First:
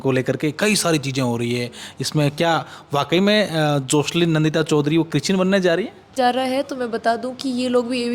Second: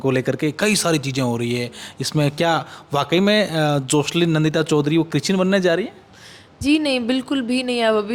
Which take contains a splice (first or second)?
first